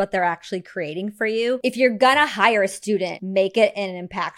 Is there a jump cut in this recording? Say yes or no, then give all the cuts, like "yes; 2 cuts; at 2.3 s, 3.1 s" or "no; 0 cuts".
yes; 2 cuts; at 1.6 s, 3.2 s